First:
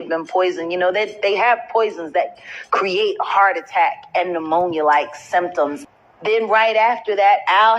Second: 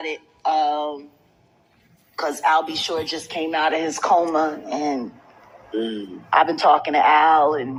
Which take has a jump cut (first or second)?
first